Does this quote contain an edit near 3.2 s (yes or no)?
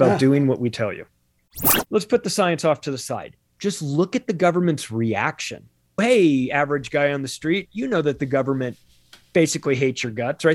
no